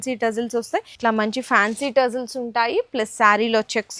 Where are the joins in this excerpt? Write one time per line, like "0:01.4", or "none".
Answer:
0:00.9